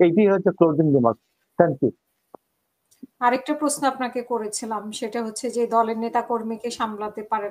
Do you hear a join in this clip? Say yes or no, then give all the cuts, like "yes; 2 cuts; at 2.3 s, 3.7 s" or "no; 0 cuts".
no; 0 cuts